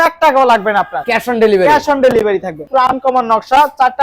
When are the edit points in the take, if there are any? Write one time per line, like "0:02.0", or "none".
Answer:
0:02.7